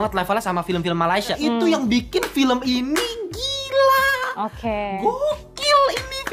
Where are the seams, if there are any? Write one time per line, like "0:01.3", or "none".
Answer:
0:01.3

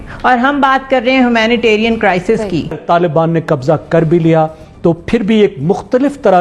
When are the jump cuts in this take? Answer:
0:02.8

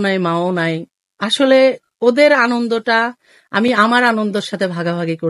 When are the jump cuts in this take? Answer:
none

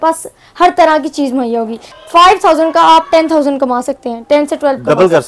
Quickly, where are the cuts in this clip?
0:01.8

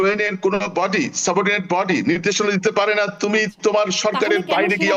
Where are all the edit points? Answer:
none

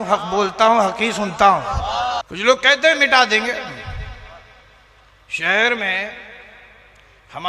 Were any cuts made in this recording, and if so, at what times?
0:02.3

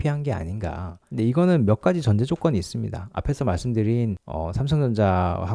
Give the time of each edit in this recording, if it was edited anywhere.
0:00.9

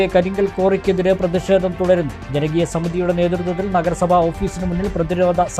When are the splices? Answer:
none

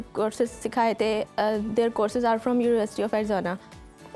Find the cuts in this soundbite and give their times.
none

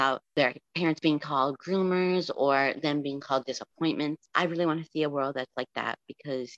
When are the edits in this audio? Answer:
none

